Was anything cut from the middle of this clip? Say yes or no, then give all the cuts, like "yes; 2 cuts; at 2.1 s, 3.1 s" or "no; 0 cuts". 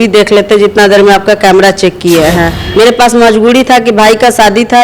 yes; 1 cut; at 2.6 s